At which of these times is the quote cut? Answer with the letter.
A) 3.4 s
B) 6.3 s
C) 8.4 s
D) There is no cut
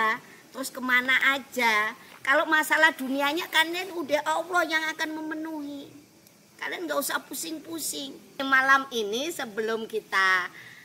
C